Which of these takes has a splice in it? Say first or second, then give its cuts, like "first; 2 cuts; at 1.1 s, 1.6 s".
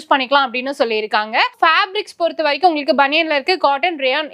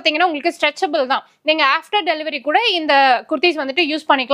first; 1 cut; at 1.5 s